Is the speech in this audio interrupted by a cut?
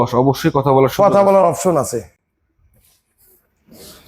no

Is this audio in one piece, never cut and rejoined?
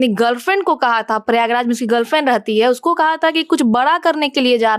yes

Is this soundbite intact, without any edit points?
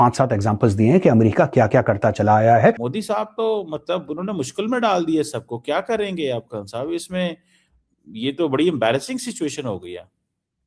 no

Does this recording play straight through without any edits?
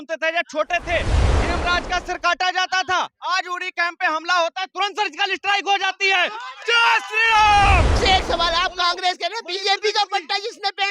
no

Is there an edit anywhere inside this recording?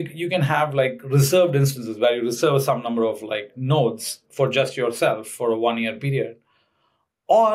no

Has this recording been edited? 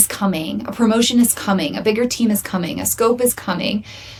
no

